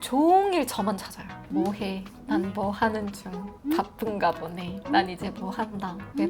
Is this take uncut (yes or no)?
yes